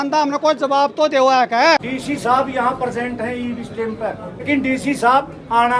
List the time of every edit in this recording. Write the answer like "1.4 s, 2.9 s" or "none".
1.8 s, 4.4 s